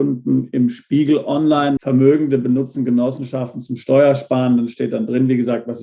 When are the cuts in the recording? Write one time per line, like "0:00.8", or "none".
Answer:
0:01.8